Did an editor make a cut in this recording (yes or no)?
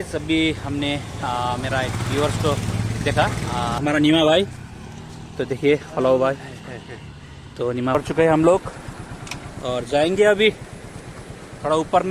yes